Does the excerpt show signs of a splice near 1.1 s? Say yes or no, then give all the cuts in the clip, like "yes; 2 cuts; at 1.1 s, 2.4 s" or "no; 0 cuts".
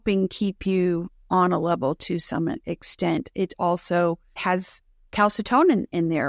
yes; 2 cuts; at 1.1 s, 4.3 s